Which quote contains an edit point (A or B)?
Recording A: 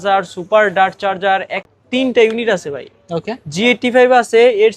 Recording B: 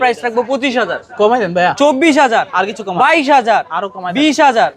A